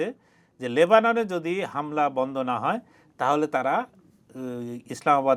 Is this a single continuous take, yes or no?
yes